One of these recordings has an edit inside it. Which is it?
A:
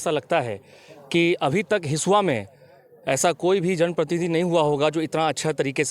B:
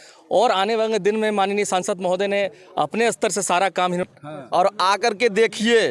B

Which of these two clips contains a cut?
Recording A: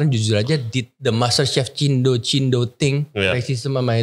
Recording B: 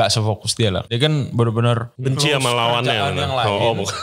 B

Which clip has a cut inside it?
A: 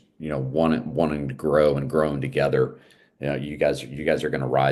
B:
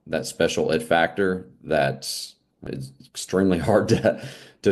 B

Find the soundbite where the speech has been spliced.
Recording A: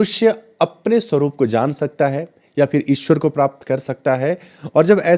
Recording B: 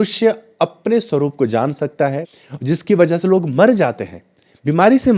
B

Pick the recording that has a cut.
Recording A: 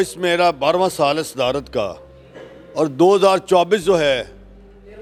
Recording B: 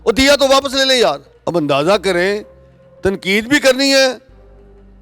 B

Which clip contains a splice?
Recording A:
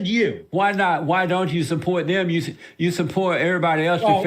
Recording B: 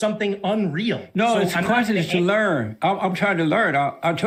A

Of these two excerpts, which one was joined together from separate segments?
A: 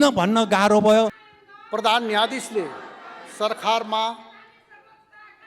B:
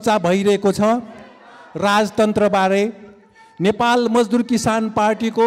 A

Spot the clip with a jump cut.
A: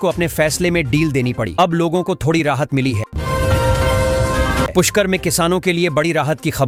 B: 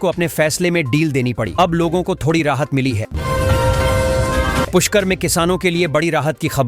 B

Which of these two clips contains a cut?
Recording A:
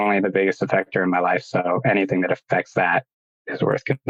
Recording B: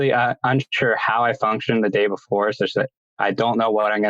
B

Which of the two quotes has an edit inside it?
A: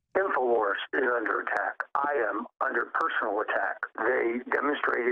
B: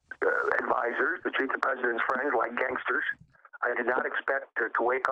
A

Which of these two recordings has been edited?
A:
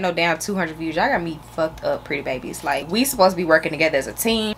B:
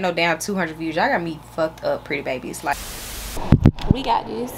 B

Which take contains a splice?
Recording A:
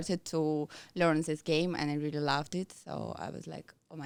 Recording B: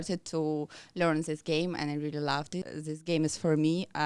B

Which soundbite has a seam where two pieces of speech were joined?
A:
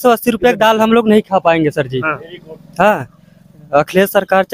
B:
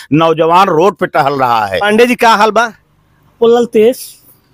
B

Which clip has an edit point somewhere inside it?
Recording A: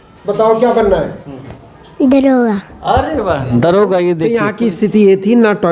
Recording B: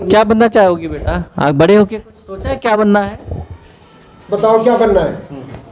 A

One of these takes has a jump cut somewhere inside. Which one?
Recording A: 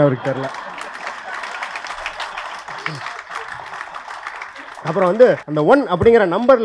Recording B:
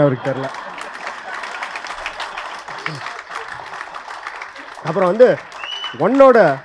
A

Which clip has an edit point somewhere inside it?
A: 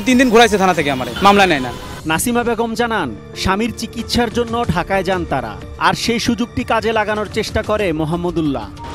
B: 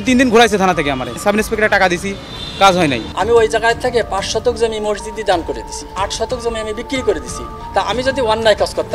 B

